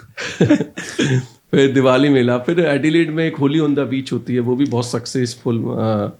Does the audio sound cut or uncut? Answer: uncut